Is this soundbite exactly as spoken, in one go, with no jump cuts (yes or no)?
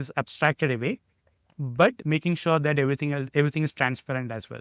yes